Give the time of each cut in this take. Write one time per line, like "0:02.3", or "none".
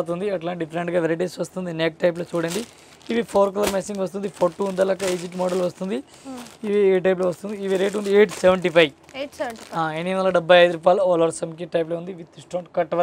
none